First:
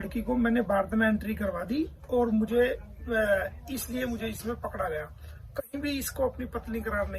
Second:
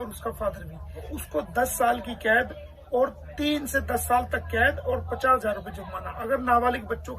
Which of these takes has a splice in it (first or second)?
second